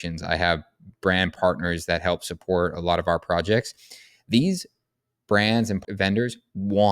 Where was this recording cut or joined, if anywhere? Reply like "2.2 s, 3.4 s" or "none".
1.3 s, 5.8 s